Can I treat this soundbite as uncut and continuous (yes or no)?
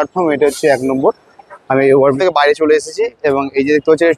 no